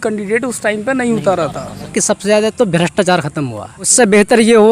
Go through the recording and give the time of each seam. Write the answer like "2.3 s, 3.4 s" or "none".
1.9 s, 3.9 s